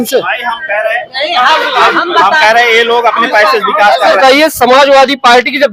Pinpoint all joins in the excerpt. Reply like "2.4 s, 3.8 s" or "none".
4.2 s